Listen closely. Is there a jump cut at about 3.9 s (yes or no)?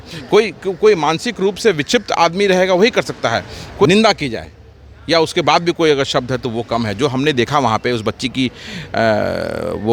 yes